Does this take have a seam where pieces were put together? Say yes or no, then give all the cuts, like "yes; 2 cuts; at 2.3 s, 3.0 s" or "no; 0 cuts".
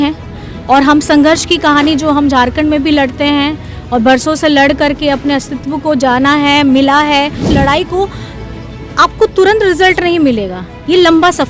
yes; 1 cut; at 7.4 s